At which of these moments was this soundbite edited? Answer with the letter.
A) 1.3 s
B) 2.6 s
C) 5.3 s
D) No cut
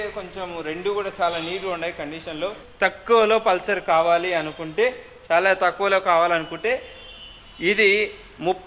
B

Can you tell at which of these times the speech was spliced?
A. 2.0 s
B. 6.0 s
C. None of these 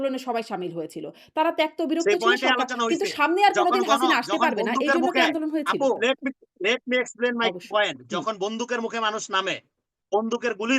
B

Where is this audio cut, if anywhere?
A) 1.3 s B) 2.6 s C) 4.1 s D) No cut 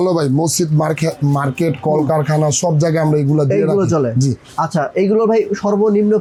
D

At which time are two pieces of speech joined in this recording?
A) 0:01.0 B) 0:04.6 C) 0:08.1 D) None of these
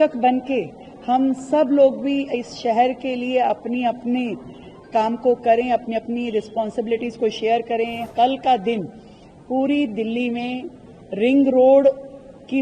C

